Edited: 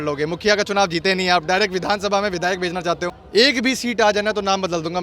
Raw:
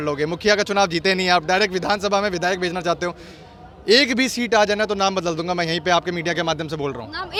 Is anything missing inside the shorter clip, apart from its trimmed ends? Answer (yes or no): yes